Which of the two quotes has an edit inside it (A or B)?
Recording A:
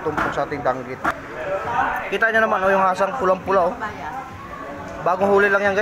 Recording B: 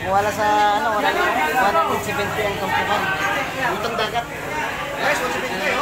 A